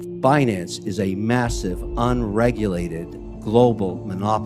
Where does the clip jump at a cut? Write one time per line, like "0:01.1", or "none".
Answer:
none